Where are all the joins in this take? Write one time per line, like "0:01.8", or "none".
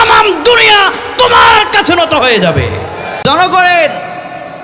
0:03.1